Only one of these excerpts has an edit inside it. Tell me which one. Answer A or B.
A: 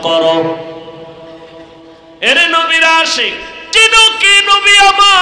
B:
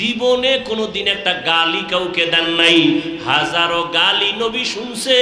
A